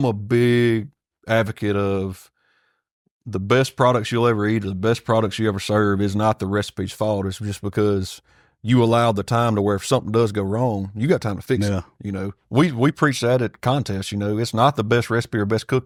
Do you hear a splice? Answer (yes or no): no